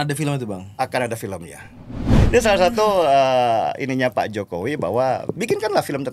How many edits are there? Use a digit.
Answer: 1